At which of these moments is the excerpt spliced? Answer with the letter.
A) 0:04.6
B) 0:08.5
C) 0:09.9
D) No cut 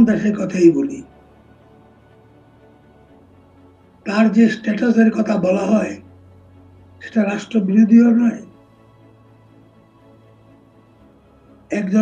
D